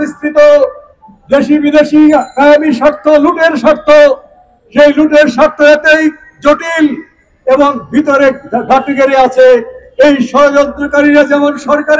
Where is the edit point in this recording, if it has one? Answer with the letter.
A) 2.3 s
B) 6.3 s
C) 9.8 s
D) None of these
D